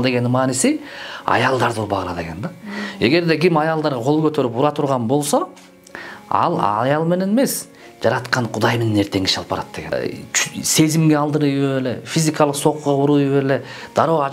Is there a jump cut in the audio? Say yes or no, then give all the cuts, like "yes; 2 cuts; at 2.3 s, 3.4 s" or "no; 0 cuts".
yes; 1 cut; at 9.9 s